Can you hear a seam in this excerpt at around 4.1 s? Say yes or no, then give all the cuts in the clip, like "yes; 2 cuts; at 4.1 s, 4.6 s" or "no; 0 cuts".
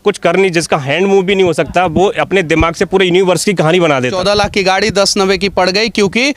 yes; 1 cut; at 4.1 s